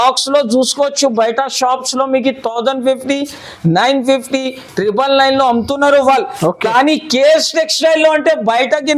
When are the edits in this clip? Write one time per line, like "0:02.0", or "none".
none